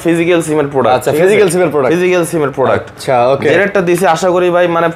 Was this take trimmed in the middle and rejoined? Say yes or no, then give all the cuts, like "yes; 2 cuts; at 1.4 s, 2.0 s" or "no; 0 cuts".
no; 0 cuts